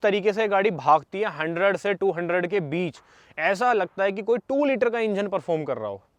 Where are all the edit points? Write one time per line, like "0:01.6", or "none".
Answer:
none